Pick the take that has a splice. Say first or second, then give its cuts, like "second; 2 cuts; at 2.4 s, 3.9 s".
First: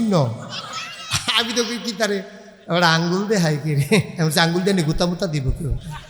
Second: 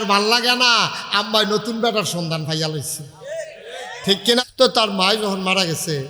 second; 1 cut; at 4.4 s